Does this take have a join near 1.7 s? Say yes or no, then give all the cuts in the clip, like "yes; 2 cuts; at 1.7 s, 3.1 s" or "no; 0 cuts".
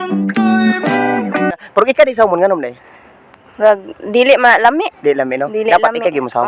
yes; 1 cut; at 1.7 s